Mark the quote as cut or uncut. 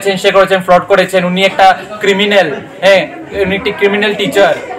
uncut